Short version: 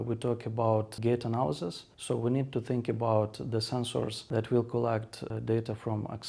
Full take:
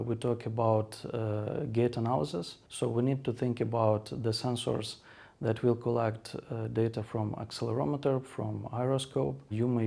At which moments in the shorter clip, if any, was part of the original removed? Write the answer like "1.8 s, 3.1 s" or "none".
0.9 s, 4.2 s, 5.3 s

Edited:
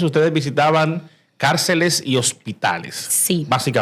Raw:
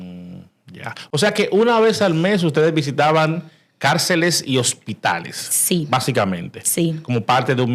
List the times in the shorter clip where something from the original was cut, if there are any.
none

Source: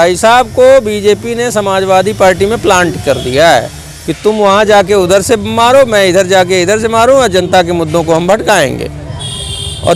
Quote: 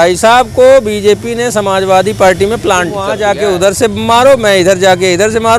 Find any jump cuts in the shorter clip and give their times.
3.1 s

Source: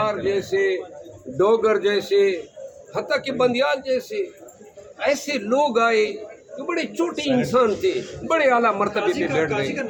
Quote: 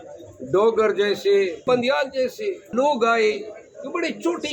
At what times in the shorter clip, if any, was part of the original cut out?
1.6 s, 2.7 s

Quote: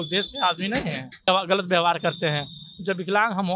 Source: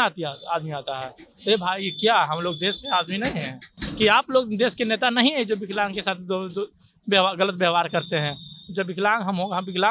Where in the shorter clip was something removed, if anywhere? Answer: 1.3 s

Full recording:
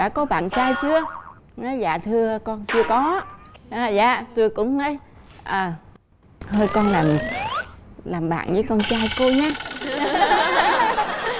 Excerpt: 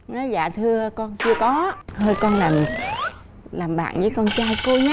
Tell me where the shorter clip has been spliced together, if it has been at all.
1.8 s

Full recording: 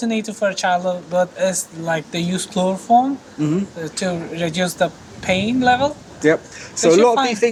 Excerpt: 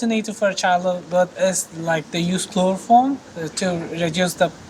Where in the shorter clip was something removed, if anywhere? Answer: 3.3 s

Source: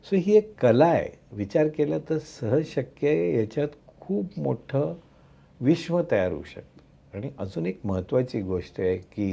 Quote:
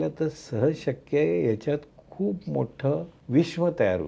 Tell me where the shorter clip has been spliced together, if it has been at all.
3.2 s

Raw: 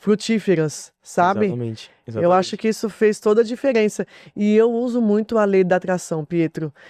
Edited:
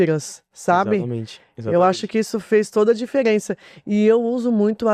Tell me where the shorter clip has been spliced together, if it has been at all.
none

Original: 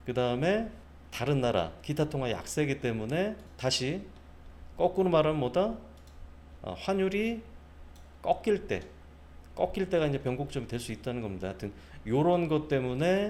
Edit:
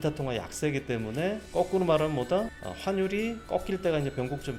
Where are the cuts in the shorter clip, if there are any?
1.4 s, 2.6 s, 3.4 s

